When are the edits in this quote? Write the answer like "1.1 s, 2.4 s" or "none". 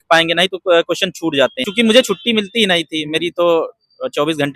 1.6 s